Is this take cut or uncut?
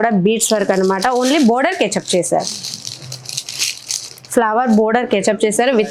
uncut